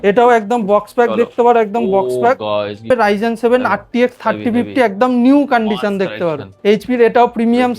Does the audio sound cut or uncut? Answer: cut